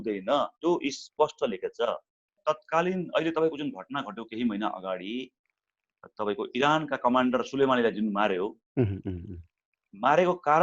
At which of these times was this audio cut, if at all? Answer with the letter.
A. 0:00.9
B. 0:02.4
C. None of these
B